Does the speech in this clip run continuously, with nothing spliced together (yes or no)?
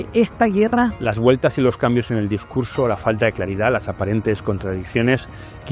no